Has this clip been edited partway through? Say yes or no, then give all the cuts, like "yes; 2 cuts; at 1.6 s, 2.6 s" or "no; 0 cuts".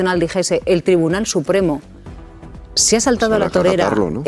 no; 0 cuts